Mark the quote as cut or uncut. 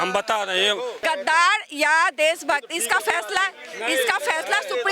cut